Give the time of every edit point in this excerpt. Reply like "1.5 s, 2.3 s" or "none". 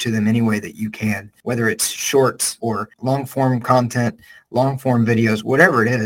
1.3 s, 2.7 s